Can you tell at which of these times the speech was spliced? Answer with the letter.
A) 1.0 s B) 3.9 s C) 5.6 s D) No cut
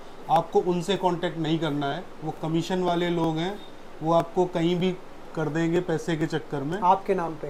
D